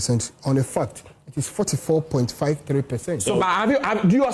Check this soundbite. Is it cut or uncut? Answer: uncut